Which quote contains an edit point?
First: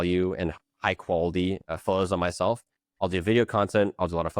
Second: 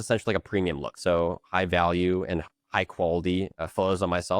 second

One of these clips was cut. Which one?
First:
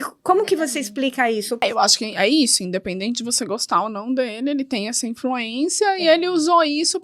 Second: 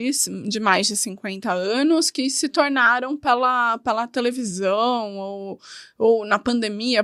first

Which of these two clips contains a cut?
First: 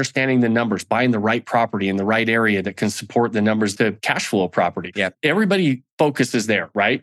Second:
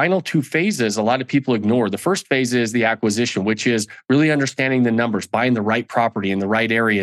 first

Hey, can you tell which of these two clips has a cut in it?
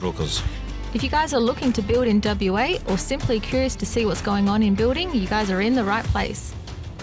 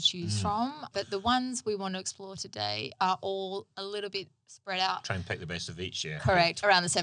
second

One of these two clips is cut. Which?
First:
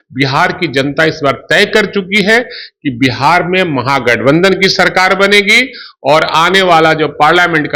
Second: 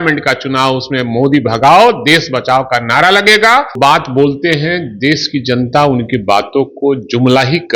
second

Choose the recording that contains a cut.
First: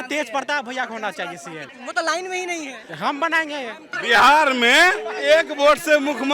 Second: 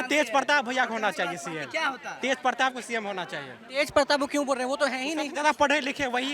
first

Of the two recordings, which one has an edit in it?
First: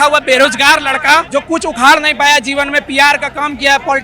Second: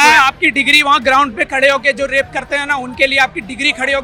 first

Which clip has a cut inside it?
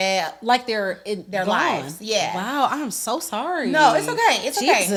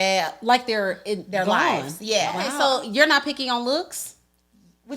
second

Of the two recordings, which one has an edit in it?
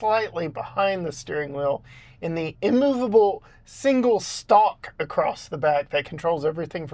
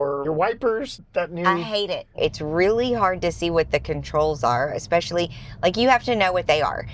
second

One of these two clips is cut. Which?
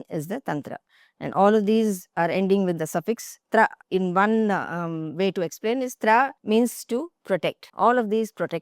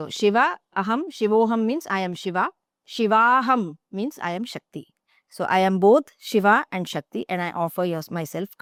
first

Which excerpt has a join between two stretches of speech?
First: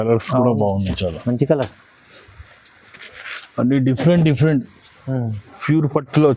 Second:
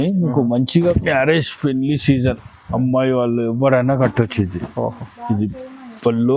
second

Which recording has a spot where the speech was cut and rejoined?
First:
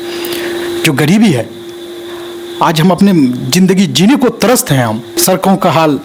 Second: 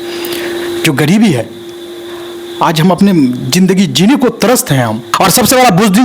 second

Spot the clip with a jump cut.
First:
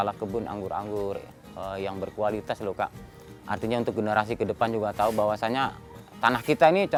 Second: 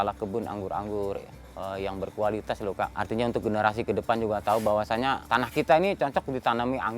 second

